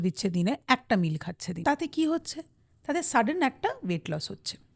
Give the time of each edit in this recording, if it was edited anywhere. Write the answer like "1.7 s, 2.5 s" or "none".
1.5 s